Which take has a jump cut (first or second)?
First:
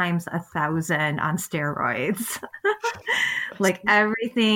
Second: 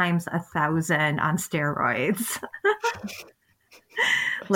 first